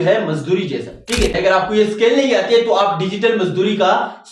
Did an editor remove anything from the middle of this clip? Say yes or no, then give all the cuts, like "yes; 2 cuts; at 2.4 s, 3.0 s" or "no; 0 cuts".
yes; 1 cut; at 1.3 s